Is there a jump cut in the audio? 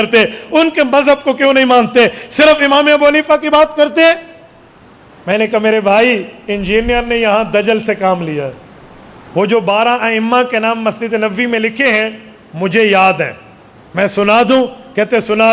no; 0 cuts

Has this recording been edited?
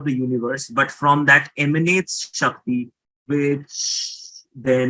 no; 0 cuts

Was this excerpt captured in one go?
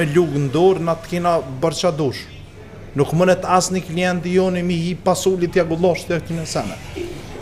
yes; 0 cuts

